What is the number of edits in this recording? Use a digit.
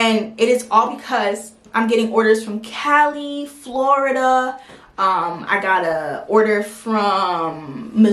1